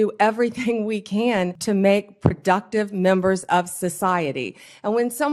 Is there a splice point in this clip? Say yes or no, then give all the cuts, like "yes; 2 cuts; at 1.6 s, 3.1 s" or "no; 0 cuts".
yes; 1 cut; at 1.6 s